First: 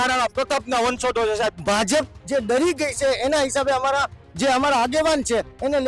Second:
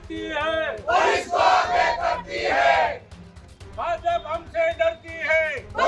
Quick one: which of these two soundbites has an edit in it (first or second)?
first